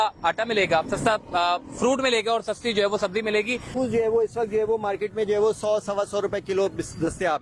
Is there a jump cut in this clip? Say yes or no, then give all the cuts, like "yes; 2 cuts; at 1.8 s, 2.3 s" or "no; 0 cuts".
yes; 1 cut; at 3.7 s